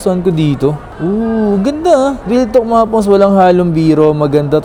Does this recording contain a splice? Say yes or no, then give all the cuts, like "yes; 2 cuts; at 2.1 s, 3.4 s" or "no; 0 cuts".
no; 0 cuts